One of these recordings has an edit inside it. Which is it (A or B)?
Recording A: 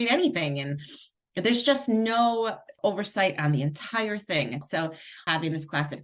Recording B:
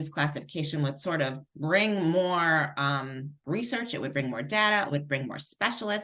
A